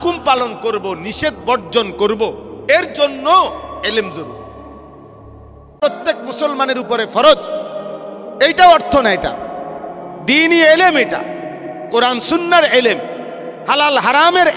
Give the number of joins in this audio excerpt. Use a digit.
1